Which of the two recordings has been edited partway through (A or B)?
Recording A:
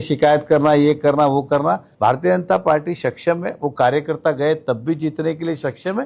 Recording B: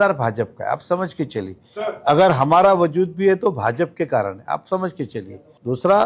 A